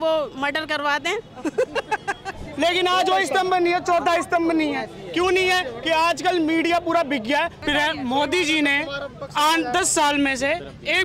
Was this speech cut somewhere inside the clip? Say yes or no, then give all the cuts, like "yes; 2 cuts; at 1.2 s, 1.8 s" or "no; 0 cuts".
yes; 2 cuts; at 2.4 s, 7.6 s